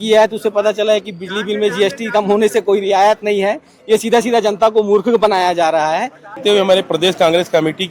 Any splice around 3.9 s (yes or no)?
no